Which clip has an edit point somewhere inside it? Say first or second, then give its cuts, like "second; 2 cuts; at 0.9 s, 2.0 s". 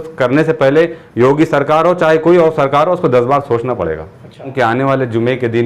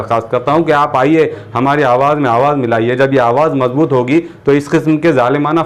first; 1 cut; at 4.5 s